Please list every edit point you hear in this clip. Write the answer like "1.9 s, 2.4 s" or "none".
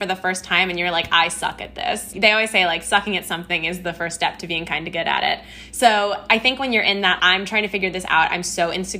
2.1 s, 7.2 s